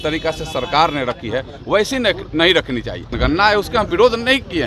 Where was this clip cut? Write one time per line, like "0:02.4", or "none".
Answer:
0:03.1